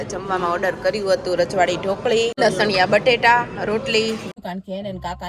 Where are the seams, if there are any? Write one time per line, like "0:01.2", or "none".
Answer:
0:02.4
0:04.3